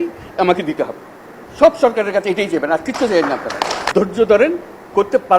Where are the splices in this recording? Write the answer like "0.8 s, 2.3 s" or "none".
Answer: 3.8 s